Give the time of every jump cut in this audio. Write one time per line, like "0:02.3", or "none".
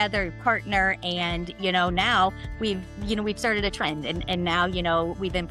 none